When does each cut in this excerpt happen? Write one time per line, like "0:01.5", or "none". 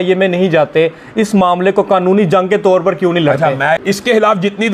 0:03.8